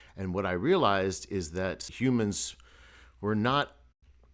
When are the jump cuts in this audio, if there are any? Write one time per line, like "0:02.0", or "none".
0:01.9

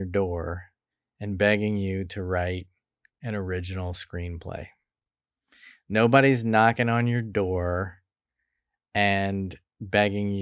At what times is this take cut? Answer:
none

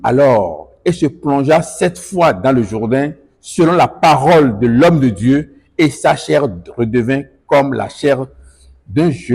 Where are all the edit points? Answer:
none

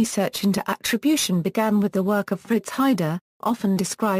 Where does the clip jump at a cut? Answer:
0:03.0

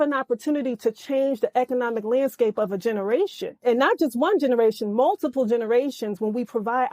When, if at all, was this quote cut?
0:03.6

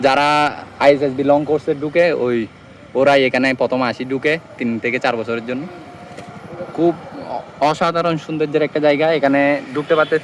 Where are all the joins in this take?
none

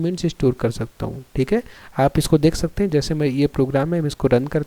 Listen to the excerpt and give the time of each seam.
none

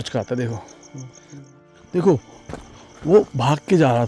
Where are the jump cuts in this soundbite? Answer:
0:01.5

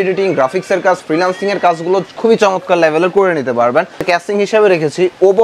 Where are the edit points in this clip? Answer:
0:04.0

